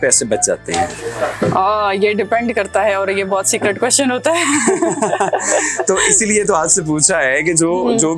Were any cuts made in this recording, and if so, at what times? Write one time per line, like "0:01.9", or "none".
none